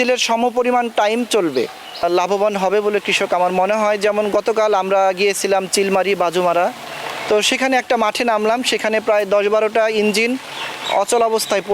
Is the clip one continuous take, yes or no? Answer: no